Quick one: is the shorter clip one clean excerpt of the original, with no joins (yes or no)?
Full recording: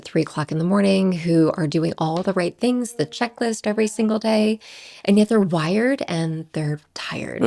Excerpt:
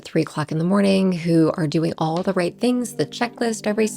yes